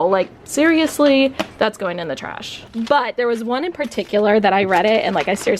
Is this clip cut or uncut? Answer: cut